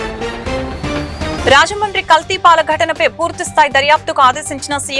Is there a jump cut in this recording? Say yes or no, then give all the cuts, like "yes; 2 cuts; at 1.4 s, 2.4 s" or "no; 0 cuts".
no; 0 cuts